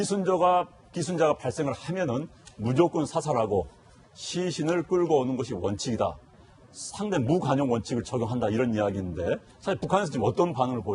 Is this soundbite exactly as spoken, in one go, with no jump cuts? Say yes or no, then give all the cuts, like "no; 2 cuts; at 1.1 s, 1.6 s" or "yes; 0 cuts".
no; 1 cut; at 7.3 s